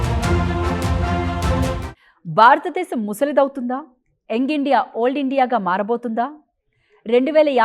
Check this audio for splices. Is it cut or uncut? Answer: cut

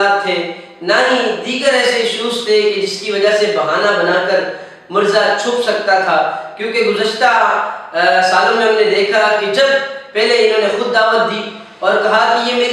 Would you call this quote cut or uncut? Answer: uncut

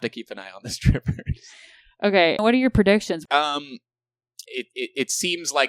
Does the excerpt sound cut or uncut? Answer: uncut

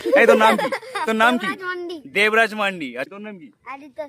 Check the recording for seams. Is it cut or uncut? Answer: cut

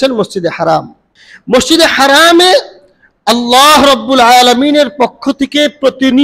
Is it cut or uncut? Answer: uncut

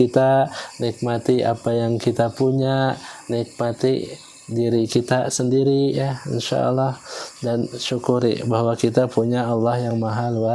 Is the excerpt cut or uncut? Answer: uncut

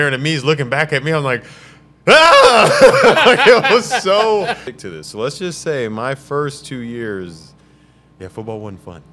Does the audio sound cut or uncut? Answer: cut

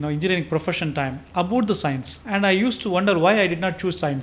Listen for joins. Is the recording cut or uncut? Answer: cut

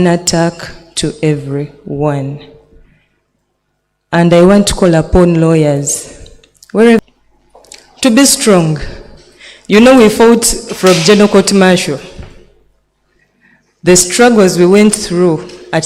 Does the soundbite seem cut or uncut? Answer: cut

